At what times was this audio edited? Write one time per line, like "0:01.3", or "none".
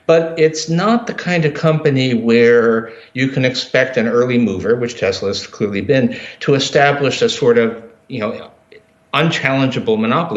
none